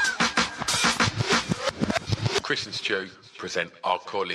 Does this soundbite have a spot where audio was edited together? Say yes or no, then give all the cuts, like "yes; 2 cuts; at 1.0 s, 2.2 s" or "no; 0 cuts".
no; 0 cuts